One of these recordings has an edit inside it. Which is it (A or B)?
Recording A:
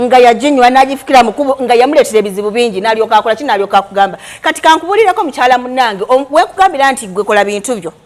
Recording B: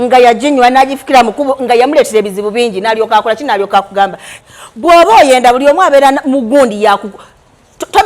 B